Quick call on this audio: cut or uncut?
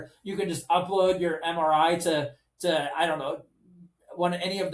uncut